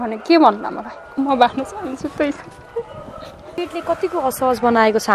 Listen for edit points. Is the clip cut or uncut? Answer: cut